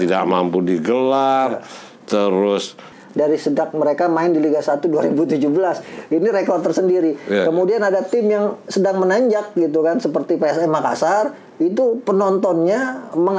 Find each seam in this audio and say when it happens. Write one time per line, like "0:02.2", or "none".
0:03.0